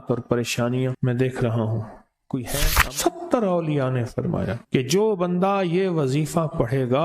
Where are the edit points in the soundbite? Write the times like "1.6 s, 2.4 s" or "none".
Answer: 1.0 s, 2.5 s, 4.6 s

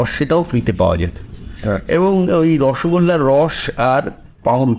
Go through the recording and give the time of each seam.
none

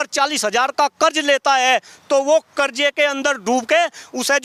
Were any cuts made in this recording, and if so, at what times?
none

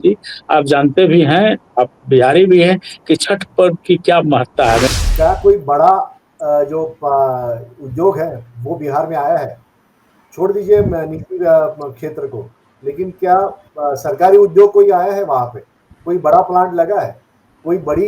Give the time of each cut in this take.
4.9 s

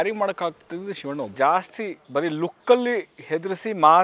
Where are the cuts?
1.3 s

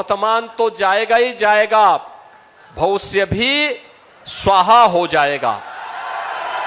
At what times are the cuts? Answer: none

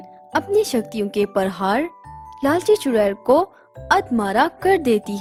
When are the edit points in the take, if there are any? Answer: none

